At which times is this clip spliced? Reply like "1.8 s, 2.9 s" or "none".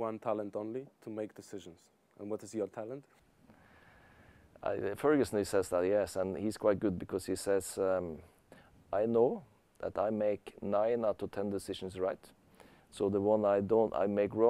none